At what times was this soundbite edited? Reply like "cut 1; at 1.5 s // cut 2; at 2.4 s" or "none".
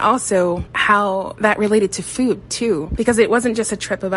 cut 1; at 2.9 s